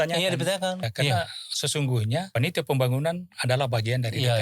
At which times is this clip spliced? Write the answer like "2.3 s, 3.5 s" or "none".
0.9 s, 2.3 s